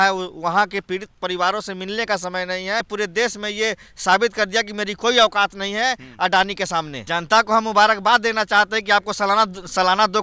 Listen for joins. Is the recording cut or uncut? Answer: cut